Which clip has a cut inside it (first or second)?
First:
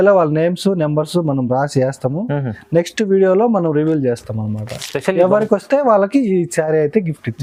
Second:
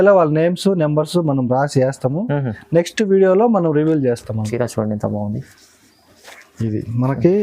second